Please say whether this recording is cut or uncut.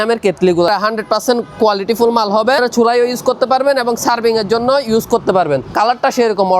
cut